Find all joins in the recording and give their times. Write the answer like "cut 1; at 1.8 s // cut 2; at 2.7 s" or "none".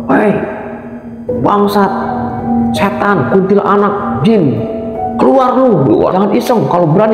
cut 1; at 6.1 s